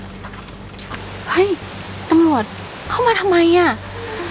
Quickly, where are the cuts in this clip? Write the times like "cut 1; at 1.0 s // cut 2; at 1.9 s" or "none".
cut 1; at 1.0 s